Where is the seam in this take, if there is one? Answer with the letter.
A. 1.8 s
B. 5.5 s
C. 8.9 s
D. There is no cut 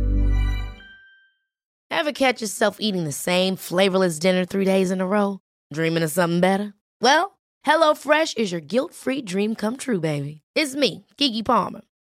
A